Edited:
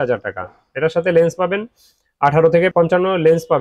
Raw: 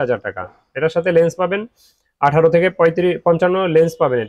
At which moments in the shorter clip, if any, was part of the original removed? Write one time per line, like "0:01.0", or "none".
0:02.7